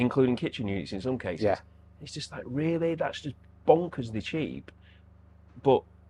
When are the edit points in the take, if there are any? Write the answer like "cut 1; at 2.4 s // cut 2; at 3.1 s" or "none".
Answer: none